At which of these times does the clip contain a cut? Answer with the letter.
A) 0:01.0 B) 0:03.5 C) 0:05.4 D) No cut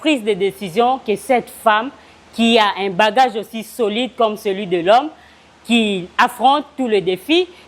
D